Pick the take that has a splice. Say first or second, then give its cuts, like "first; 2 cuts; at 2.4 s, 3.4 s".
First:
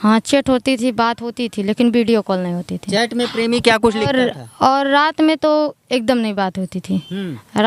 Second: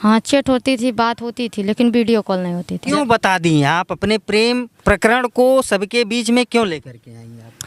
second; 2 cuts; at 2.8 s, 4.7 s